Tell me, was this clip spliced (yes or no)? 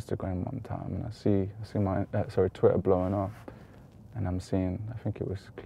no